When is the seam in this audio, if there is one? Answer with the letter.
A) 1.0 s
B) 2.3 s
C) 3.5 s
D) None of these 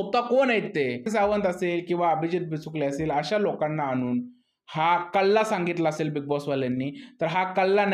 A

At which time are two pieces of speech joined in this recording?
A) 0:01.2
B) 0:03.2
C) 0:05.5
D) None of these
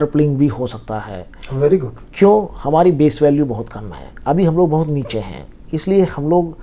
D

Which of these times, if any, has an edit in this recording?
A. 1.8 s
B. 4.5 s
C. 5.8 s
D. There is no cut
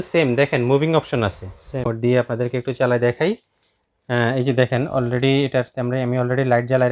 A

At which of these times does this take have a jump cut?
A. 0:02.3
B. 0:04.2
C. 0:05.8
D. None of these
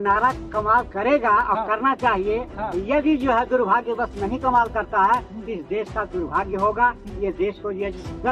D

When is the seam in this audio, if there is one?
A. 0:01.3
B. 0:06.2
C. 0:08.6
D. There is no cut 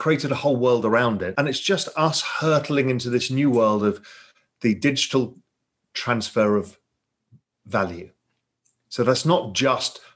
A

